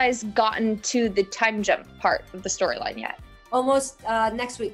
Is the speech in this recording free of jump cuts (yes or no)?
yes